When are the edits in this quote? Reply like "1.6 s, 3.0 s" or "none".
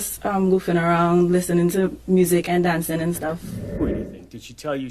3.8 s